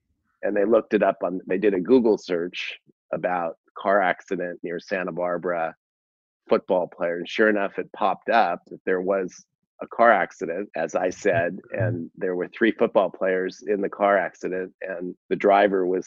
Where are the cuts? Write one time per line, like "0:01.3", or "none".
0:10.7
0:15.1